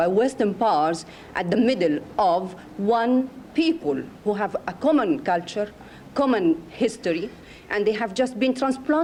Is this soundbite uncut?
yes; 0 cuts

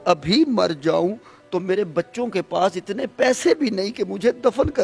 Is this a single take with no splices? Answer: yes; 0 cuts

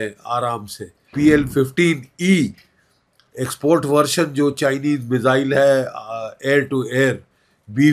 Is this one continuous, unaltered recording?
no; 1 cut; at 1.1 s

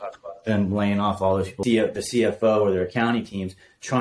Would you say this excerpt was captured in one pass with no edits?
no; 1 cut; at 1.6 s

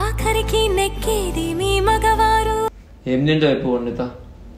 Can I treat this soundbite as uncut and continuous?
no; 1 cut; at 2.7 s

